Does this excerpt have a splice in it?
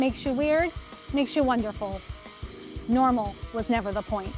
no; 0 cuts

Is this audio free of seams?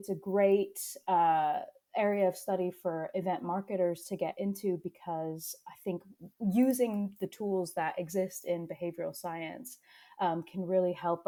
yes; 0 cuts

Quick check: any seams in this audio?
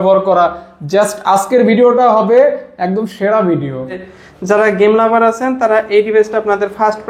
yes; 1 cut; at 4.0 s

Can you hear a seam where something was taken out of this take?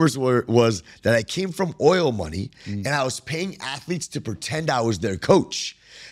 no; 0 cuts

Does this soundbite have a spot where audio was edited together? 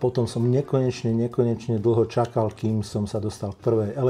no; 0 cuts

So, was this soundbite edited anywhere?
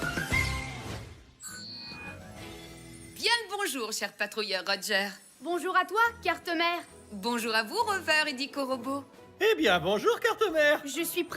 yes; 1 cut; at 3.1 s

